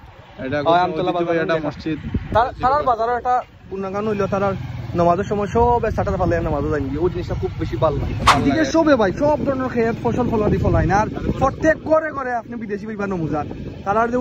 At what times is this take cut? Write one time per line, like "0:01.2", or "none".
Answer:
0:02.3
0:08.4